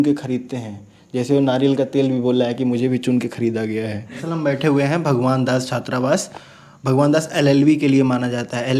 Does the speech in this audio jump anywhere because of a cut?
yes; 1 cut; at 4.1 s

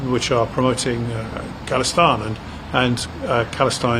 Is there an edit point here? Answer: no; 0 cuts

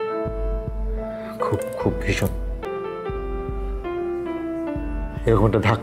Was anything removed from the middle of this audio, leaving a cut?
yes; 1 cut; at 2.6 s

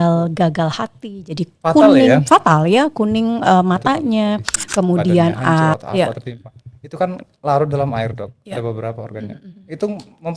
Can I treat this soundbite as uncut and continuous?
no; 1 cut; at 5.8 s

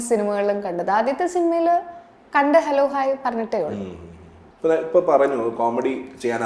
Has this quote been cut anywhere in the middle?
no; 0 cuts

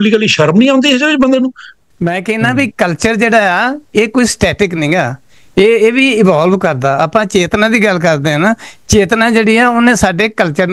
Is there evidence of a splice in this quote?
yes; 1 cut; at 1.7 s

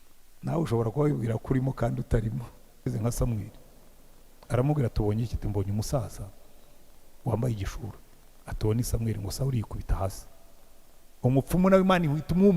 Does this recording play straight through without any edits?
no; 1 cut; at 2.9 s

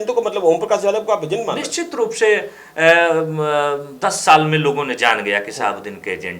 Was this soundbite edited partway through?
no; 0 cuts

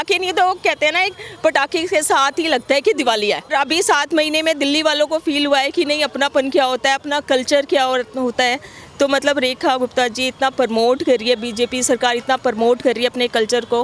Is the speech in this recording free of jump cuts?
no; 1 cut; at 3.5 s

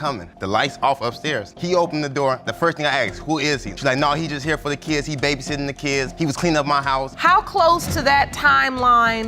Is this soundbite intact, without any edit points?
no; 1 cut; at 7.1 s

